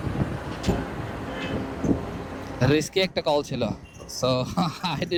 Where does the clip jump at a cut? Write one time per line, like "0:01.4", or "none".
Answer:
none